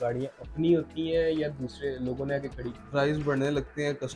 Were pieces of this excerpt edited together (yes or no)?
yes